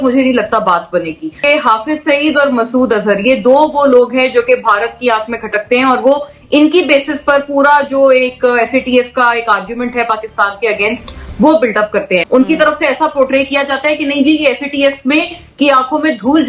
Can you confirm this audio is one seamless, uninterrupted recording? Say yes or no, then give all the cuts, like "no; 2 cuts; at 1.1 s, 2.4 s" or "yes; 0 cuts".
no; 2 cuts; at 1.4 s, 12.2 s